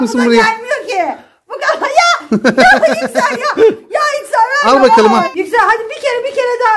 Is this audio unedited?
no; 1 cut; at 5.3 s

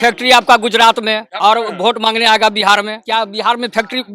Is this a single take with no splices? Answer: no; 2 cuts; at 1.3 s, 3.0 s

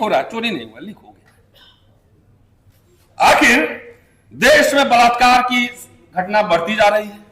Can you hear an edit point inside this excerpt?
yes; 1 cut; at 2.8 s

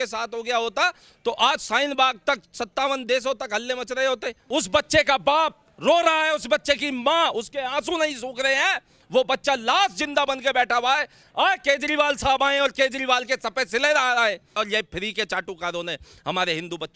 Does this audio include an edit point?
yes; 2 cuts; at 4.3 s, 14.5 s

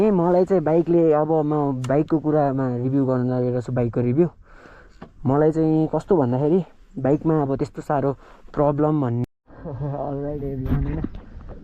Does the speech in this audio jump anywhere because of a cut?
yes; 1 cut; at 9.2 s

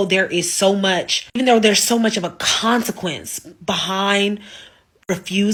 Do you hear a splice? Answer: no; 0 cuts

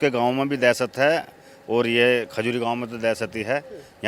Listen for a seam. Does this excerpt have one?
no; 0 cuts

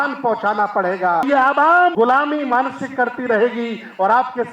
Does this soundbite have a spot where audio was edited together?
yes; 2 cuts; at 1.3 s, 1.9 s

